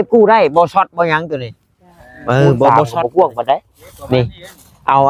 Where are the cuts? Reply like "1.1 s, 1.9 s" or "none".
2.7 s